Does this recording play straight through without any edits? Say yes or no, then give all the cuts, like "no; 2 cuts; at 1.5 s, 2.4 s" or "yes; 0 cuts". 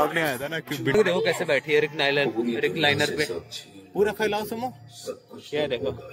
no; 1 cut; at 0.9 s